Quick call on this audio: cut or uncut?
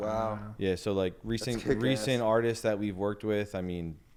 uncut